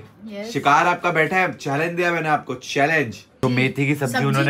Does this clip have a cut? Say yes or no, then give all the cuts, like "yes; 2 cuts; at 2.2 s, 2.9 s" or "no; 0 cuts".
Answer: yes; 1 cut; at 3.4 s